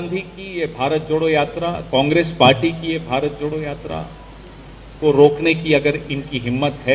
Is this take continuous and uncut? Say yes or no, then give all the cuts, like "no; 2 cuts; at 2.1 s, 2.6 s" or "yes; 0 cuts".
yes; 0 cuts